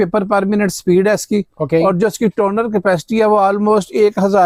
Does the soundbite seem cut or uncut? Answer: uncut